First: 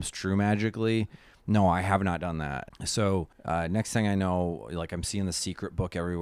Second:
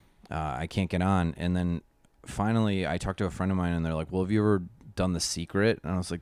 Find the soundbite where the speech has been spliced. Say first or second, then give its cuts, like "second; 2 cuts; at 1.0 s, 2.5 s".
first; 2 cuts; at 2.6 s, 3.3 s